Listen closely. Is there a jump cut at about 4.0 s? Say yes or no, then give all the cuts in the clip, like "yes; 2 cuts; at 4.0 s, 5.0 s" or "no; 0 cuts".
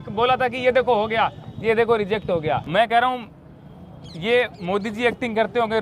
no; 1 cut; at 2.6 s